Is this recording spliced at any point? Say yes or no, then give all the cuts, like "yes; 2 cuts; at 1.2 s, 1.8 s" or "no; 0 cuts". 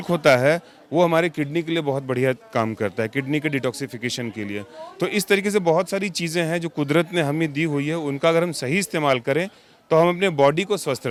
no; 0 cuts